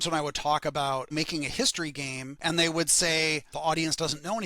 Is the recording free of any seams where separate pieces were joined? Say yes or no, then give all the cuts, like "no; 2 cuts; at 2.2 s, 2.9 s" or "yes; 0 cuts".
no; 3 cuts; at 1.1 s, 2.4 s, 3.5 s